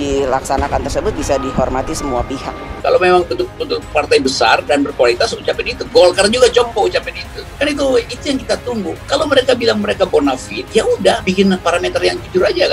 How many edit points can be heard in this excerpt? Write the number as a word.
two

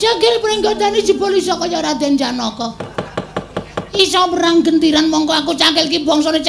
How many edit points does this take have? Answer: one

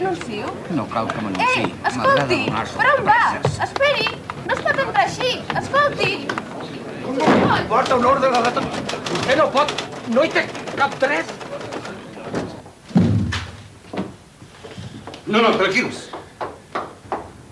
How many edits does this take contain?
one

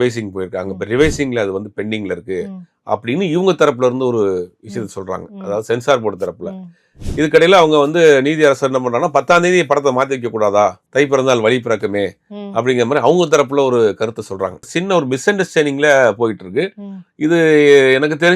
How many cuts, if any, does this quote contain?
three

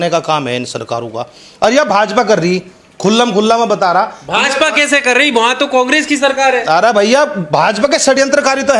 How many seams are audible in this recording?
zero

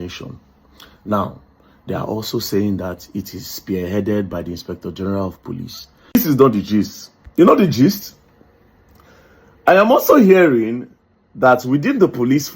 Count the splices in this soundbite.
one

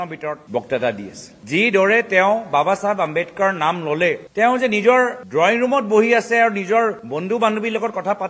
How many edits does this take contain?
zero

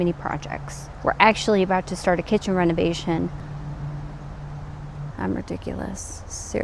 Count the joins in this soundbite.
zero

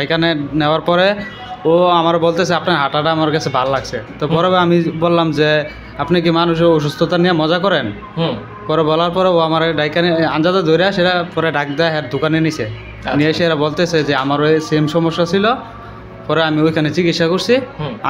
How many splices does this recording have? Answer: zero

